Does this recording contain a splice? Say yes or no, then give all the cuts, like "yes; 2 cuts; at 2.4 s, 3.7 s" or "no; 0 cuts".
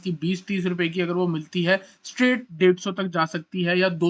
no; 0 cuts